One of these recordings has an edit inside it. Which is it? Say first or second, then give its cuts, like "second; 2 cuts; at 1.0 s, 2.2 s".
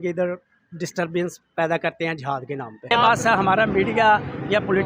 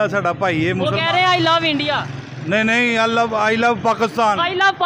first; 1 cut; at 2.9 s